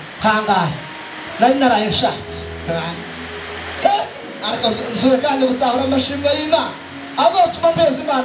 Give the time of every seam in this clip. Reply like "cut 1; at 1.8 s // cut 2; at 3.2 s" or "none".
cut 1; at 3.8 s